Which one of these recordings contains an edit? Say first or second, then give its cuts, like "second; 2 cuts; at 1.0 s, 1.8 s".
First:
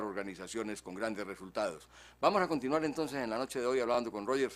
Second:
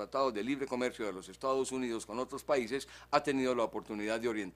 second; 1 cut; at 1.3 s